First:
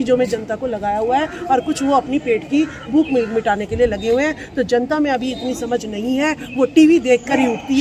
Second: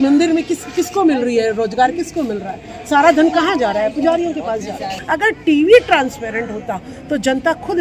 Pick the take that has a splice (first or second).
second